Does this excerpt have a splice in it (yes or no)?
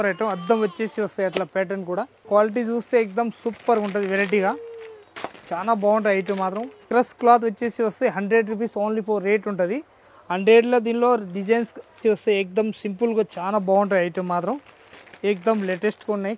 yes